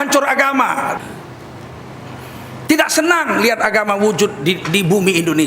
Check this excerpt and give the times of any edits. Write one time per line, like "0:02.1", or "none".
0:01.0